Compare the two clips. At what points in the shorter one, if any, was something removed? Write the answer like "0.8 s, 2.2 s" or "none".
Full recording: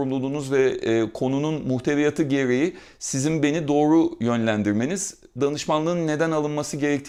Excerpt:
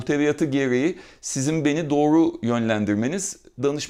none